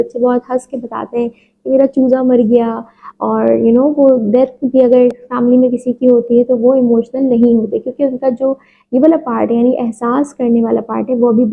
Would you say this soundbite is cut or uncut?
uncut